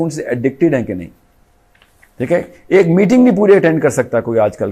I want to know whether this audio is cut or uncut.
uncut